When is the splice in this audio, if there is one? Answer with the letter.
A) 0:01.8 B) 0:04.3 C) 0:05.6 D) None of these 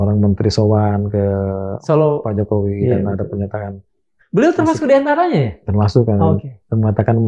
D